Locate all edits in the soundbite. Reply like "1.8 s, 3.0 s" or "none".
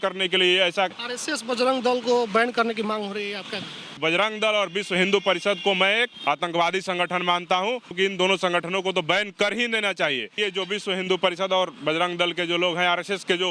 1.1 s, 4.0 s, 6.1 s, 7.9 s, 10.3 s